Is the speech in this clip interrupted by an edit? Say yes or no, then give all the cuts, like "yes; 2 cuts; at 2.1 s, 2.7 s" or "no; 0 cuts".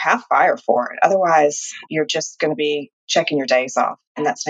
yes; 1 cut; at 2.9 s